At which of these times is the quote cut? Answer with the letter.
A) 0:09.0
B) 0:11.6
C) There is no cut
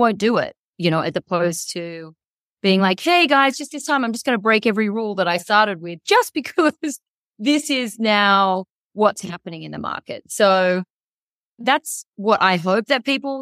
B